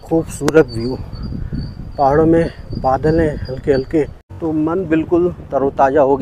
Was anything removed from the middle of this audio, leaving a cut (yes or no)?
yes